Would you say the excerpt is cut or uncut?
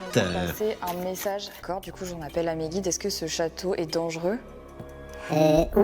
cut